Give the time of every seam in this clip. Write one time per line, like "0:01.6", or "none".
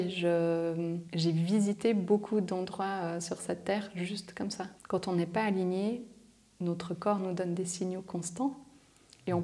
0:01.0
0:04.7